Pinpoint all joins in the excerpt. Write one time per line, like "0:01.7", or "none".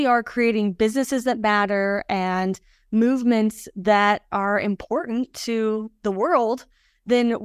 none